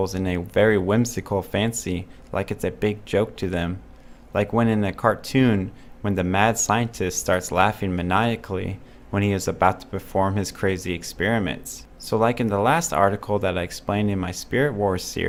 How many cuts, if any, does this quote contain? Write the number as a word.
zero